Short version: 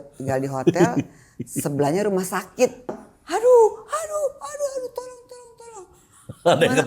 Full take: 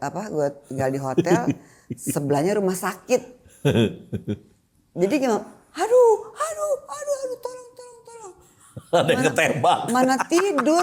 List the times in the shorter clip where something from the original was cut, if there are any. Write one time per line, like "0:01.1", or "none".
0:03.0